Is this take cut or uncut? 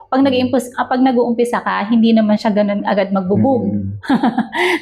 uncut